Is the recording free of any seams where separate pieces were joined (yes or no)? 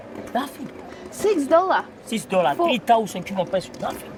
yes